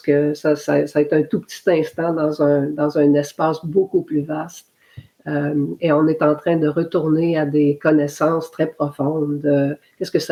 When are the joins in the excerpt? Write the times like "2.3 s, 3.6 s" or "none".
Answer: none